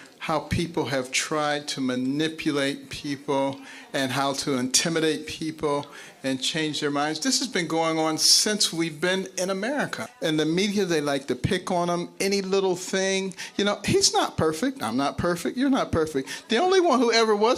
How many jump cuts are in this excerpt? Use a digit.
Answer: 1